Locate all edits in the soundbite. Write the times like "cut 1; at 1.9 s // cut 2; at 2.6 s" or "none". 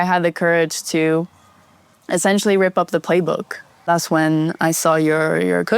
cut 1; at 3.9 s